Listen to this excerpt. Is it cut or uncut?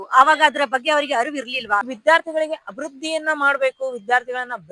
cut